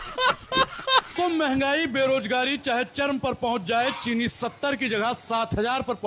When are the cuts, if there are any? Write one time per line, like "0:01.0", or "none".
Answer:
0:01.1